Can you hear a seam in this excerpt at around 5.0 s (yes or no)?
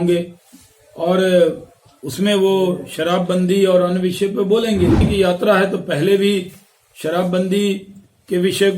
yes